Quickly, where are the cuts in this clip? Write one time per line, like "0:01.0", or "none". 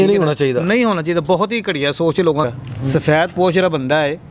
0:02.4